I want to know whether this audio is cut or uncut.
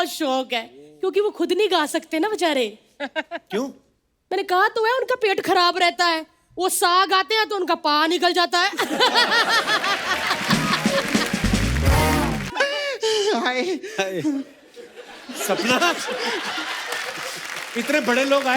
cut